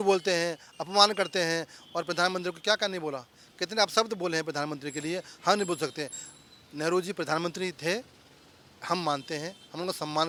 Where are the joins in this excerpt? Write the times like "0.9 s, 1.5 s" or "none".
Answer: none